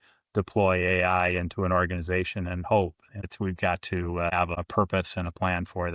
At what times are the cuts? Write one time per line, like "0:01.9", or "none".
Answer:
0:03.2
0:04.6